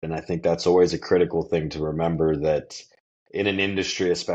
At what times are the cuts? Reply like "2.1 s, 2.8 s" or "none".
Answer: none